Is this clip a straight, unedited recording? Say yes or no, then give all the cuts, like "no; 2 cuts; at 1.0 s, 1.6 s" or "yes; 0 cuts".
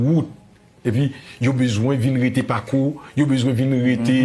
yes; 0 cuts